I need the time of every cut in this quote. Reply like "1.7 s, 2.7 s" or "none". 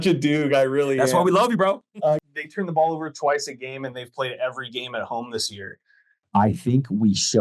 2.2 s, 6.2 s